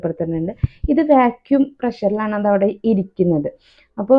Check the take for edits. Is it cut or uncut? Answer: uncut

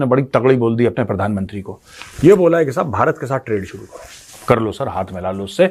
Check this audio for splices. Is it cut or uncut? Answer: cut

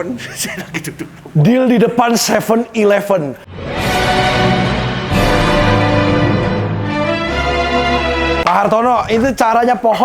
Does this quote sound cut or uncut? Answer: cut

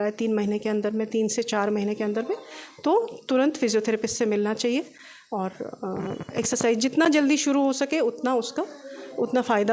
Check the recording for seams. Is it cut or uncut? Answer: uncut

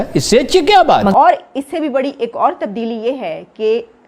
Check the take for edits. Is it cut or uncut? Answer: cut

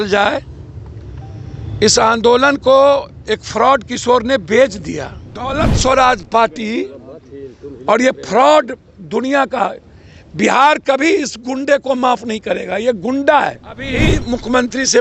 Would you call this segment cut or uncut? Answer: cut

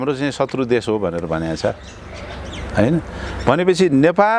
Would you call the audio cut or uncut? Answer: uncut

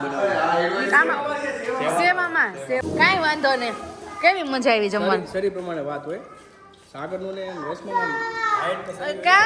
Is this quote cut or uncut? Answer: cut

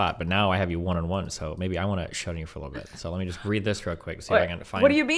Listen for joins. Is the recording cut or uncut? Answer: uncut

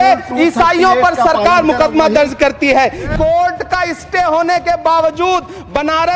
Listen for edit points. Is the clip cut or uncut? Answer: cut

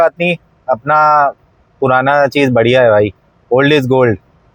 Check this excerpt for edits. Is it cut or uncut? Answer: uncut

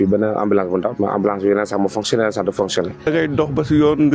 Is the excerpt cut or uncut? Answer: cut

